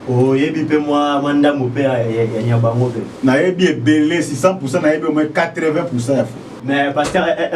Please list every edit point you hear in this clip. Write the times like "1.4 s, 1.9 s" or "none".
6.5 s